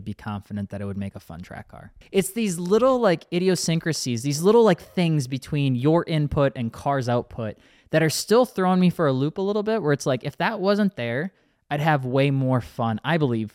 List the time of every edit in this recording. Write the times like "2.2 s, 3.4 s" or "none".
2.0 s